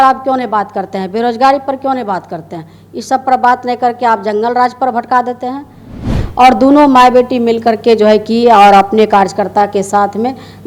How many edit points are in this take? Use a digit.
1